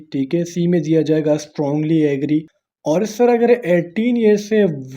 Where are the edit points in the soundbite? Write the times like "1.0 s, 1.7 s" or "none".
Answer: 2.5 s